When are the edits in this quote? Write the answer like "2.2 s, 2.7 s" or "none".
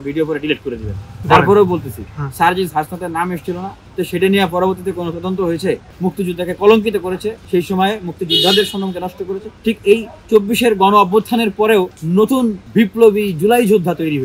1.2 s, 3.8 s, 5.9 s, 7.4 s, 9.4 s, 12.0 s, 12.6 s